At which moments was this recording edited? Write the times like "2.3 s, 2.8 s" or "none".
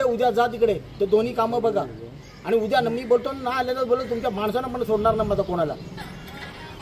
none